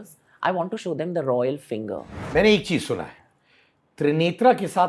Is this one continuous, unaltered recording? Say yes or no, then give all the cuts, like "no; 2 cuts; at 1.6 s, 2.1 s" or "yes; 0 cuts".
no; 1 cut; at 2.1 s